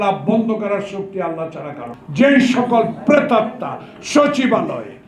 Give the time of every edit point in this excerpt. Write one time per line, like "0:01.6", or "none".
0:01.9